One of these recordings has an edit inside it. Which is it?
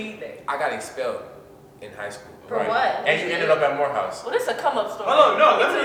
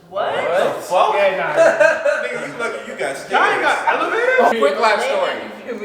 second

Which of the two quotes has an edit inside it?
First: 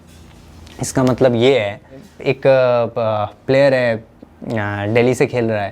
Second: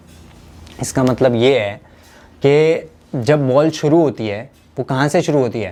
first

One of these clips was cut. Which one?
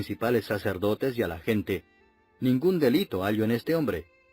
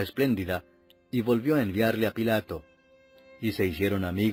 first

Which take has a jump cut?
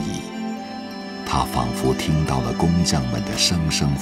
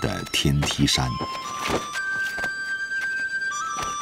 first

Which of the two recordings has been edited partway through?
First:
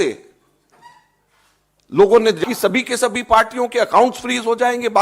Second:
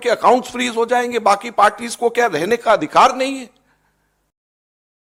first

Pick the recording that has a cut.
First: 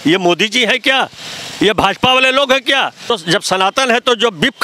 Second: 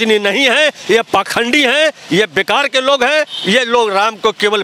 first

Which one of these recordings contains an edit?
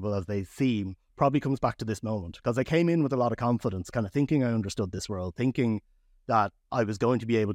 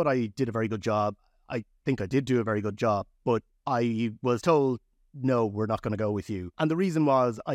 second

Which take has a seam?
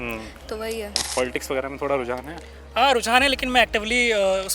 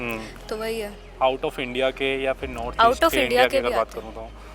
first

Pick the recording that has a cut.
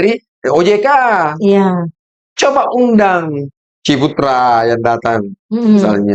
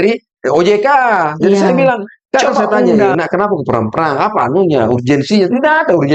second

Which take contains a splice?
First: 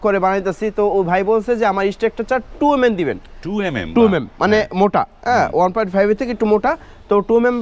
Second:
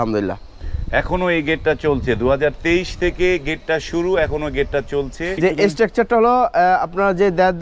second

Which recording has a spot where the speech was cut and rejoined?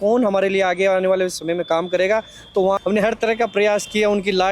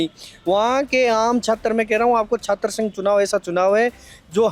first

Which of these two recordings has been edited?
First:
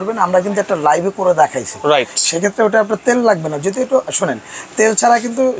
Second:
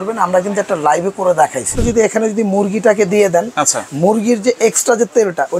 second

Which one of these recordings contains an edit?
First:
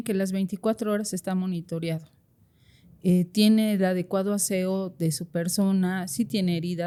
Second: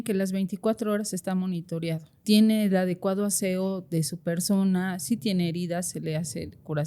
second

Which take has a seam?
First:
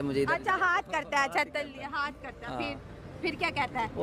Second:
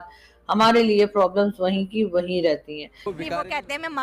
second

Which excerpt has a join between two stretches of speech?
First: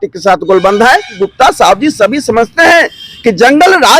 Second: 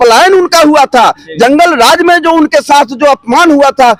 first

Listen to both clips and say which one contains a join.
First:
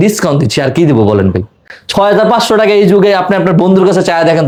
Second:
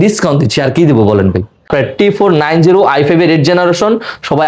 second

